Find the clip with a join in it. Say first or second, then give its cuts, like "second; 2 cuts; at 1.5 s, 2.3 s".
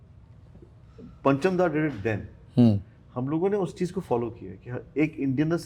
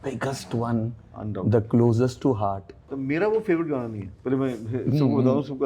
second; 1 cut; at 2.9 s